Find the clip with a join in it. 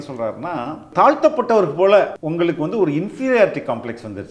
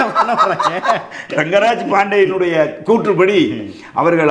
first; 2 cuts; at 0.9 s, 2.2 s

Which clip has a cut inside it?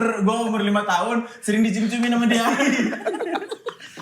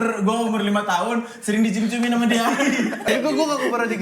second; 1 cut; at 3.1 s

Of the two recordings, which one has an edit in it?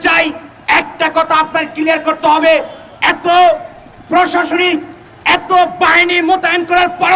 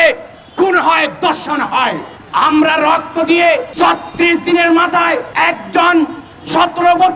second; 3 cuts; at 2.1 s, 3.7 s, 5.3 s

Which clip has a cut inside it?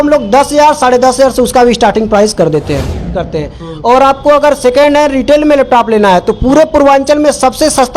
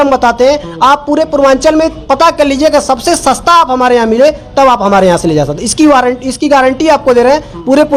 first; 1 cut; at 3.3 s

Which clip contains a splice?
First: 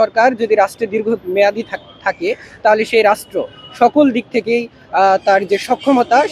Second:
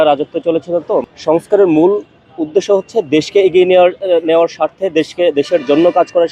second; 1 cut; at 1.1 s

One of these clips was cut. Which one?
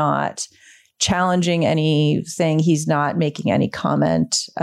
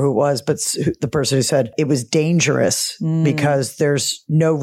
second; 1 cut; at 1.7 s

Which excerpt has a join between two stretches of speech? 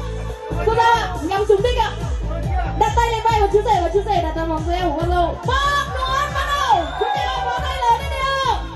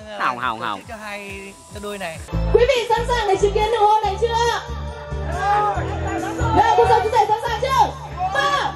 second; 1 cut; at 2.3 s

